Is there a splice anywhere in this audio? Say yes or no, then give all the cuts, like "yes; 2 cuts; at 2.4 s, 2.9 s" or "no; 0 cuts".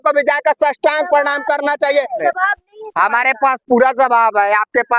yes; 1 cut; at 2.2 s